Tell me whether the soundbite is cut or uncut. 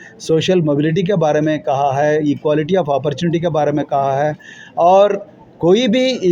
uncut